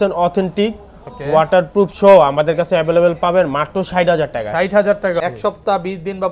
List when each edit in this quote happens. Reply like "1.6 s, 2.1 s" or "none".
5.2 s